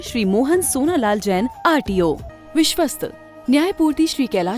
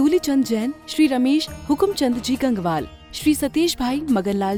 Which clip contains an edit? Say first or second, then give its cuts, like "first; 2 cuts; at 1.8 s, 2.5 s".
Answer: first; 1 cut; at 2.3 s